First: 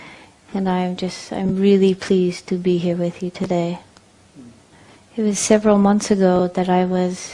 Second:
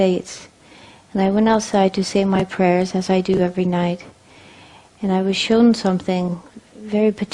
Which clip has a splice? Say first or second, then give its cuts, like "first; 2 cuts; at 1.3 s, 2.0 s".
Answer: first; 1 cut; at 3.8 s